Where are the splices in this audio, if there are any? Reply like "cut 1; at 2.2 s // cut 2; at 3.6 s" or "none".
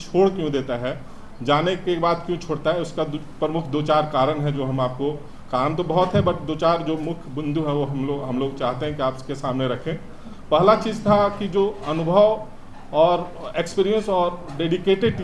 none